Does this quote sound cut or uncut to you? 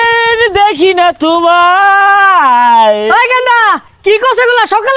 uncut